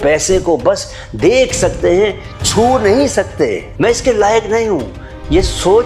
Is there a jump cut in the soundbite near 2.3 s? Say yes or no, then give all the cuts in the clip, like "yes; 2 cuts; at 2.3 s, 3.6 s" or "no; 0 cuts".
no; 1 cut; at 3.6 s